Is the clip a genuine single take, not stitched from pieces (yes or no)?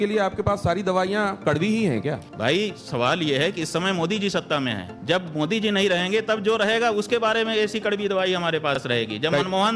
no